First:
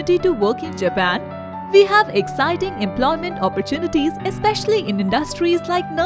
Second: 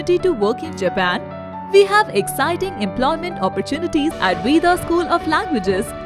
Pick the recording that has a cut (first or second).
second